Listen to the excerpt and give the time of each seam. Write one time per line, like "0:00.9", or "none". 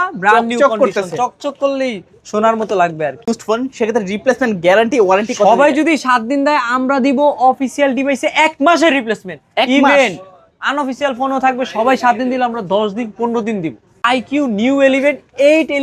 0:03.2
0:14.1